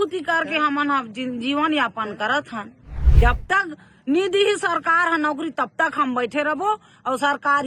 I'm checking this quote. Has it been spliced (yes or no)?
yes